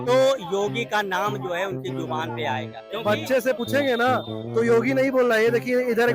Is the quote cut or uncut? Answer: cut